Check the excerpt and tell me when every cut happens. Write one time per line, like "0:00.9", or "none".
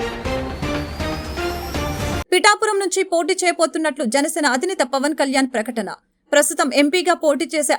0:02.2